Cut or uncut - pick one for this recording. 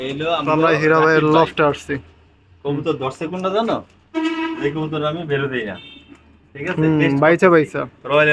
uncut